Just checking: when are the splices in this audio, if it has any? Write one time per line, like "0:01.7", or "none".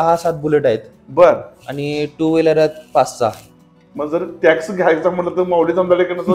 none